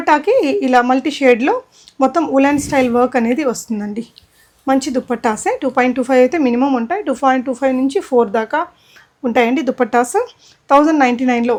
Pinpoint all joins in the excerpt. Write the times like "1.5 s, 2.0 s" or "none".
none

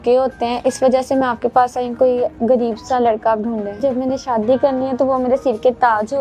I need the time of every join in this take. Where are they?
1.9 s, 3.8 s

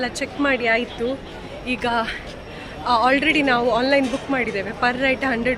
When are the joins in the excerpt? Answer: none

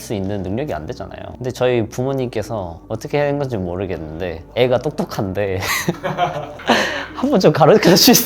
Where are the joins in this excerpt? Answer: 4.4 s

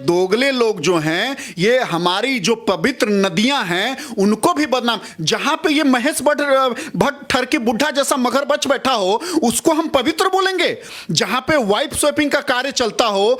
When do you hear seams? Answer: none

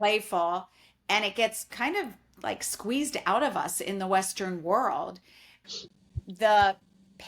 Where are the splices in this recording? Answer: 5.6 s

